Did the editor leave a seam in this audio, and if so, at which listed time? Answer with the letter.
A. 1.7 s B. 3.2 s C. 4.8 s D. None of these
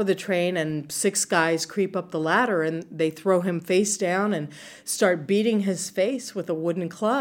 D